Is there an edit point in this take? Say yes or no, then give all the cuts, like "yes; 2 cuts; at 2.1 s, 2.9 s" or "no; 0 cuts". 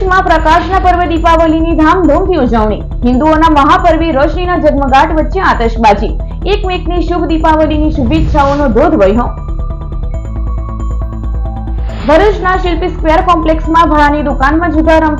no; 0 cuts